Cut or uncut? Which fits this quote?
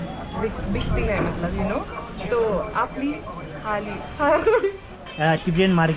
uncut